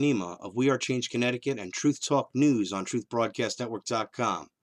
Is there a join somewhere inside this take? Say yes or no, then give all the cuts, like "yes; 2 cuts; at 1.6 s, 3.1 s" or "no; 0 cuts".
no; 0 cuts